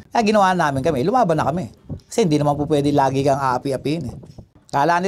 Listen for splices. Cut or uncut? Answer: uncut